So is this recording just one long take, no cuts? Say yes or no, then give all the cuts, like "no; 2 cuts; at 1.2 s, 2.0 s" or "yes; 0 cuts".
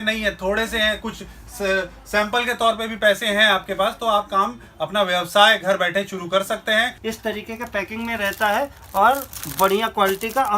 no; 1 cut; at 7.0 s